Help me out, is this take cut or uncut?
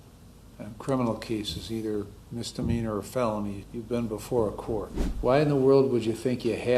cut